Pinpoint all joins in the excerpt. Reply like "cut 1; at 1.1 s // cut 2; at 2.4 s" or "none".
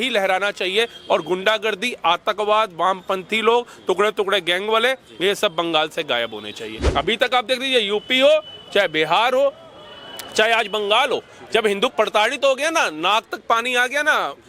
cut 1; at 6.8 s